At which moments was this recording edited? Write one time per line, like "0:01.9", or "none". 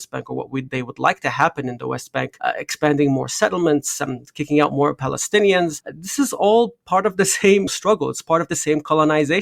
0:07.7